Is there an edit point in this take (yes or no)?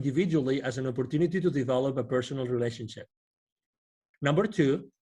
yes